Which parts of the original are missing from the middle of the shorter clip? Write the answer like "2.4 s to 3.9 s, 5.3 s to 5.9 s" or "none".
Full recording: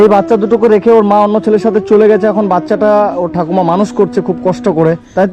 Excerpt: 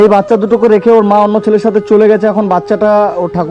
none